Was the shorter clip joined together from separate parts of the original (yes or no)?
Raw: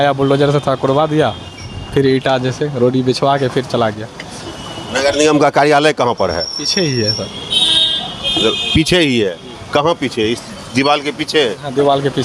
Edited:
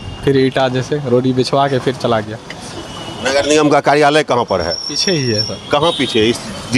yes